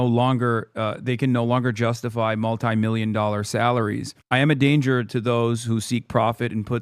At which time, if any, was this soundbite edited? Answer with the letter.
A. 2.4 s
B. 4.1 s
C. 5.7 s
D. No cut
B